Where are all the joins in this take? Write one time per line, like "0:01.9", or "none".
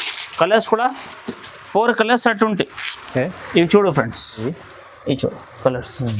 0:04.4

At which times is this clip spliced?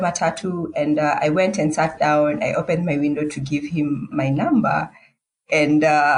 none

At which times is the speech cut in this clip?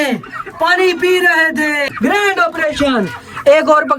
0:01.9

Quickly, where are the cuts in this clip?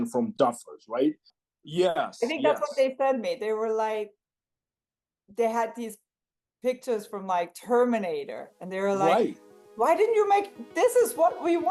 0:01.3

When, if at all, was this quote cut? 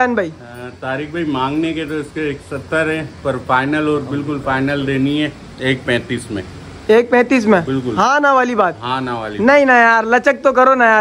none

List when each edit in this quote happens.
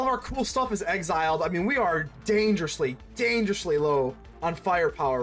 0:04.3

